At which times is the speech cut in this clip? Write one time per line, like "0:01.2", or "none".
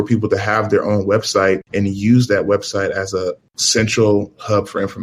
none